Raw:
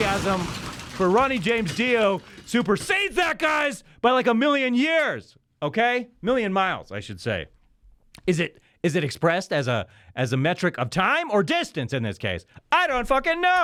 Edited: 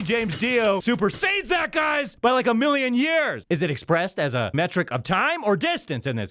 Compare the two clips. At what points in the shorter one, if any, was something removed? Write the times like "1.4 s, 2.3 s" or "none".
0.8 s, 2.1 s, 3.4 s, 4.5 s